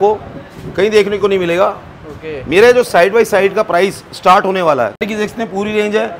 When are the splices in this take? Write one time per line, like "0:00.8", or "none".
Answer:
0:05.0